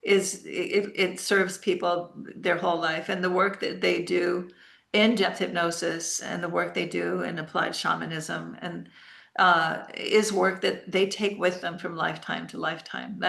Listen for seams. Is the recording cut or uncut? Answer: uncut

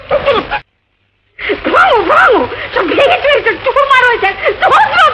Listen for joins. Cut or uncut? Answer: uncut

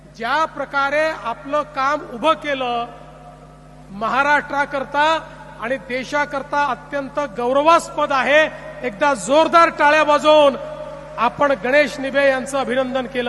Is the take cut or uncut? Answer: uncut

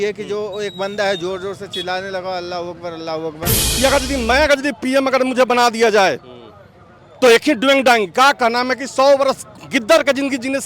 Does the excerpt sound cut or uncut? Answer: cut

